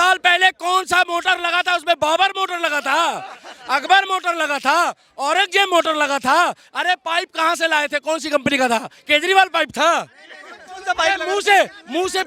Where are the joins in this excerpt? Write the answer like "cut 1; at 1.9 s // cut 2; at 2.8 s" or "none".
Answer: none

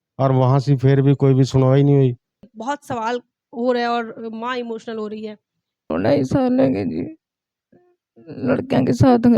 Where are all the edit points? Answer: cut 1; at 2.5 s // cut 2; at 5.9 s

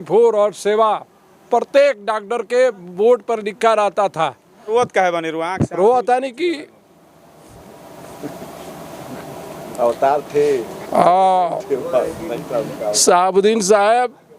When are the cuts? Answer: cut 1; at 4.7 s

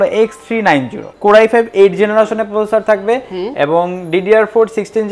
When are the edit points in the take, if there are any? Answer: cut 1; at 1.1 s

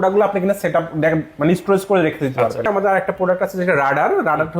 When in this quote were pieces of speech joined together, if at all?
cut 1; at 2.6 s

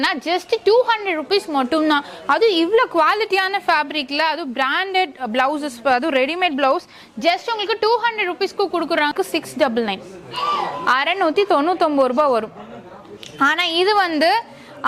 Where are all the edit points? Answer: cut 1; at 9.1 s

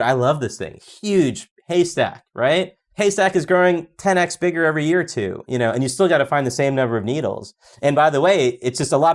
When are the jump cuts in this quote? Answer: cut 1; at 2.8 s

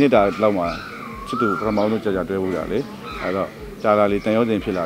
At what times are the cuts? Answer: none

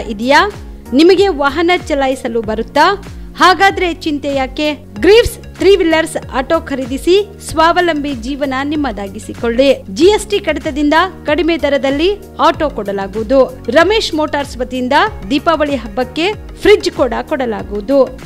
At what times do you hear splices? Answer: none

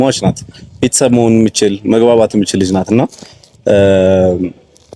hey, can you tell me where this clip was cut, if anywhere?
none

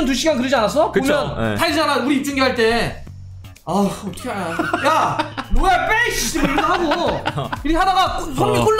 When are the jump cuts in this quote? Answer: none

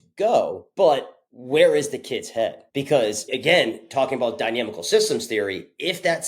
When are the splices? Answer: cut 1; at 0.9 s // cut 2; at 2.7 s

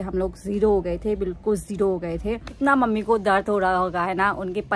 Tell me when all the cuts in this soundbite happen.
cut 1; at 2.5 s

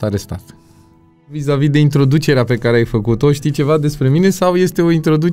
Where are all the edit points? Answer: cut 1; at 1.4 s

